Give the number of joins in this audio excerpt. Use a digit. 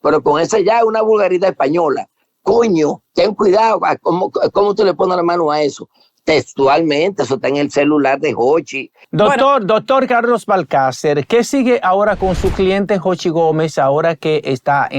1